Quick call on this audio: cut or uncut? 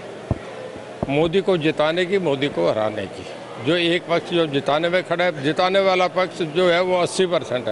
uncut